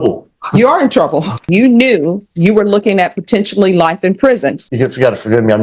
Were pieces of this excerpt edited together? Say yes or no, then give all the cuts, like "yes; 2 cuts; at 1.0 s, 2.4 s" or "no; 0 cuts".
yes; 2 cuts; at 1.5 s, 4.6 s